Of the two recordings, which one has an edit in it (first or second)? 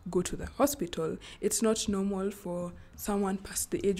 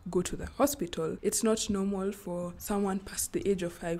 second